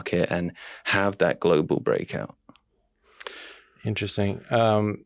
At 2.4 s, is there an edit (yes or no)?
no